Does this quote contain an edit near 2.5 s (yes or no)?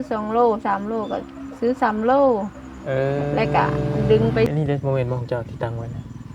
no